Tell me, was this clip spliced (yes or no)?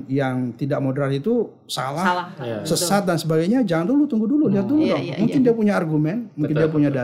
no